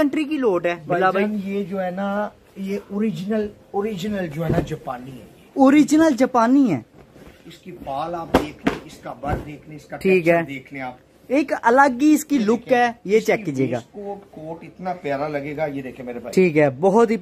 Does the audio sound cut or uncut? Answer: uncut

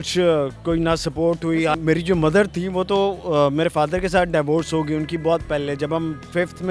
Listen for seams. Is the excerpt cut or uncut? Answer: cut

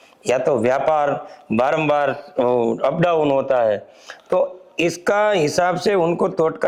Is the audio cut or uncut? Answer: uncut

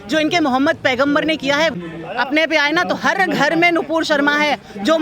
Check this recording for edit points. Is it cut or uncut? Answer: cut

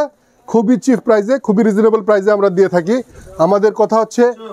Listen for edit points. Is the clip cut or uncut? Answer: uncut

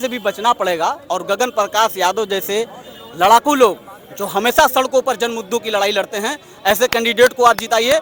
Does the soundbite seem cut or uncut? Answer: uncut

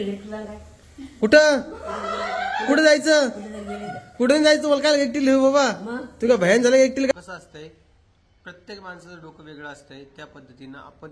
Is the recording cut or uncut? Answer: cut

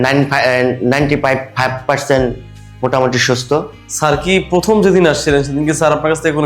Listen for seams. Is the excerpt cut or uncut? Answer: cut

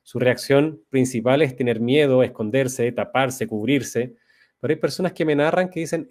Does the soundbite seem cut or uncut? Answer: uncut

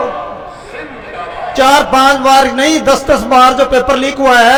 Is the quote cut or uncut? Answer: uncut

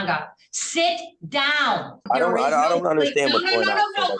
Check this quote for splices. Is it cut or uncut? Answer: cut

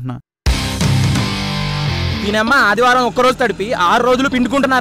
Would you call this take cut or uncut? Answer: cut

